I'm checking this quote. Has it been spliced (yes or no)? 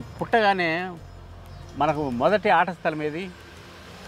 no